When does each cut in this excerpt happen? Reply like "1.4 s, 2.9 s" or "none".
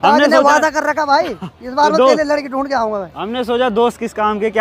none

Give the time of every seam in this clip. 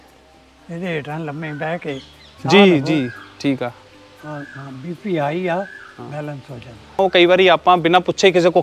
7.0 s

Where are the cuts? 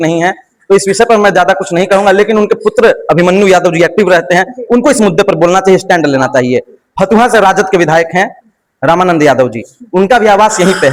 none

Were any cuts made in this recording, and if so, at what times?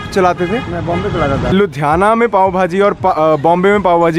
1.5 s

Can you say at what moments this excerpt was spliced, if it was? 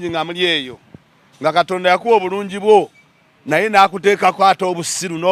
none

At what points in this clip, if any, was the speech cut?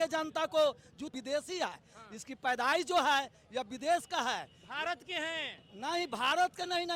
1.1 s

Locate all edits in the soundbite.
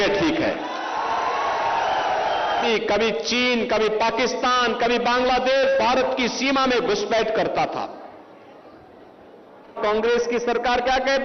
2.7 s, 9.8 s

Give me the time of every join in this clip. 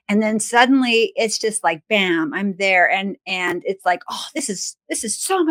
none

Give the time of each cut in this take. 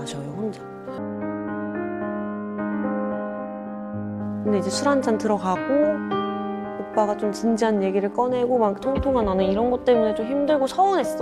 1.0 s

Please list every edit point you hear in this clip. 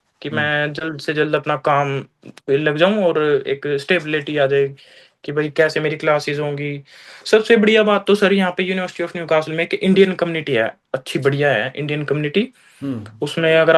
none

